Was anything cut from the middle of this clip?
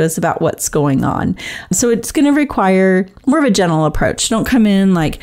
yes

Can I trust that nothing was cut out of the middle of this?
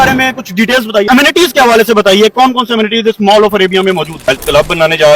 no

